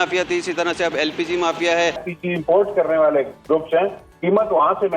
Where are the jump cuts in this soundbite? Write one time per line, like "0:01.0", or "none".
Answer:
0:02.1
0:04.1